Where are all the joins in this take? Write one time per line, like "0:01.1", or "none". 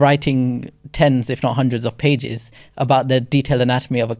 none